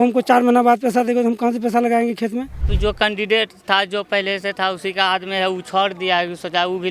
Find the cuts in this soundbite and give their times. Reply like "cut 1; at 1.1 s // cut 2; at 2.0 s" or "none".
cut 1; at 2.7 s